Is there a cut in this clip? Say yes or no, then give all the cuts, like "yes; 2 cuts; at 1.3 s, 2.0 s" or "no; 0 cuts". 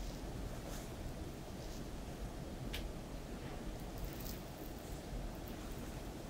no; 0 cuts